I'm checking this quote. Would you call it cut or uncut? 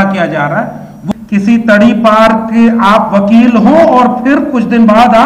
cut